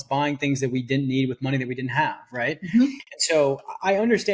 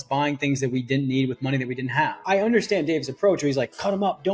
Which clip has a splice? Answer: second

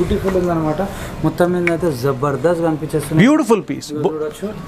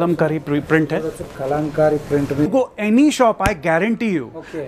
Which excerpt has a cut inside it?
second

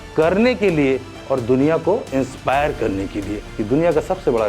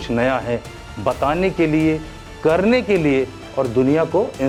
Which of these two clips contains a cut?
first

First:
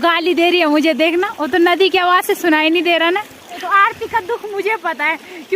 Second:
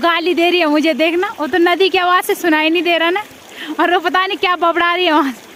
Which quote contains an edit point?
first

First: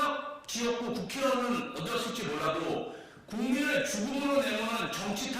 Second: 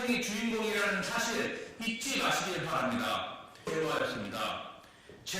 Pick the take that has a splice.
second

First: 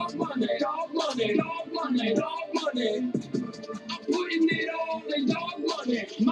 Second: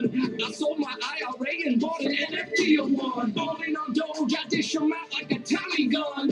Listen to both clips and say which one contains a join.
second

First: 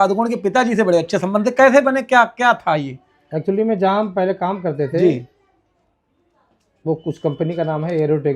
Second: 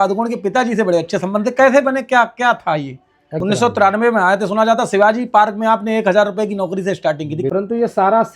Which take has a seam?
second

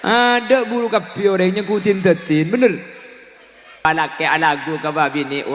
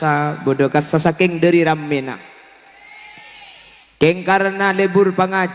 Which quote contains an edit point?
first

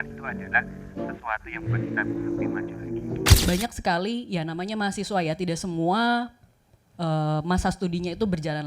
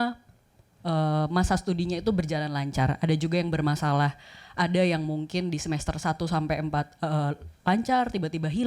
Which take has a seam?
first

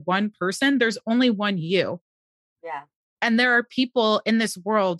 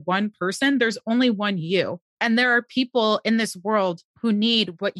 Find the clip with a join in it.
second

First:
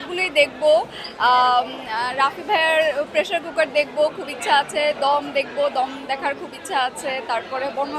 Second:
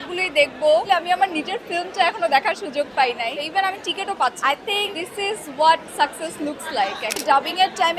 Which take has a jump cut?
second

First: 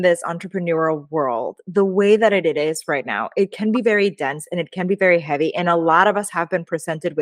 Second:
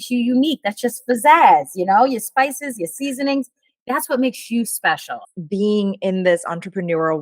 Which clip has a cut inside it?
second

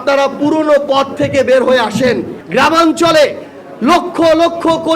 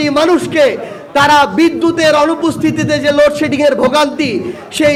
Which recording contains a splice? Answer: first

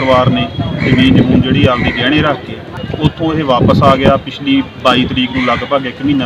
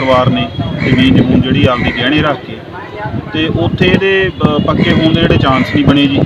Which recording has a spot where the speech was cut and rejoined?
first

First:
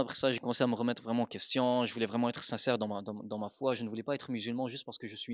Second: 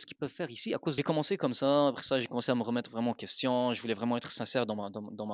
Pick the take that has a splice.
second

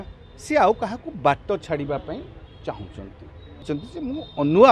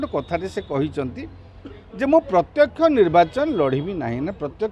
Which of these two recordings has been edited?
first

